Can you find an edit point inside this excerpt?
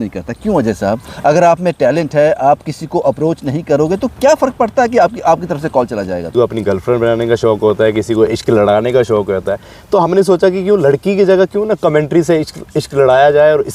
yes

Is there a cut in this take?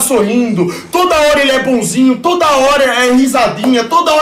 no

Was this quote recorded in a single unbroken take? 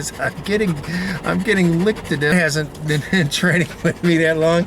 no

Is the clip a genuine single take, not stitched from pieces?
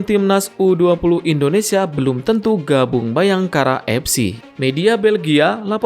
no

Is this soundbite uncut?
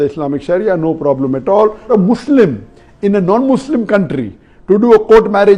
no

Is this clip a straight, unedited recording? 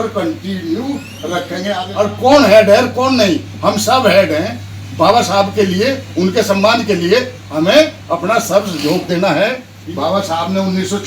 no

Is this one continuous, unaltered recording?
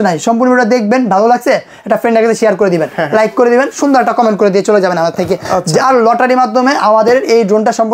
yes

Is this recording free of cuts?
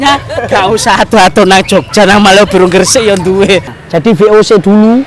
no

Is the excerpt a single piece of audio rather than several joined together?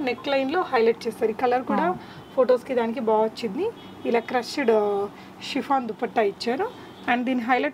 yes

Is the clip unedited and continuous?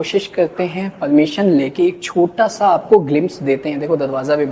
yes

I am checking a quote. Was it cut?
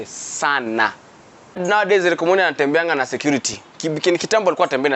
yes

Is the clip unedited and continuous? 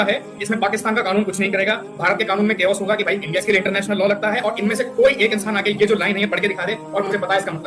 no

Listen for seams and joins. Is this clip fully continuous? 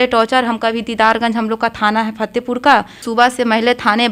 no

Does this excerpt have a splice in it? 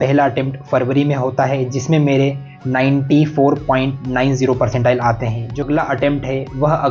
yes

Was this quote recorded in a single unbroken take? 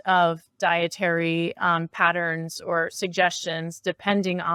yes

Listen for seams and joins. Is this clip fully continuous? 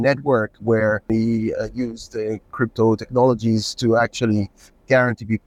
no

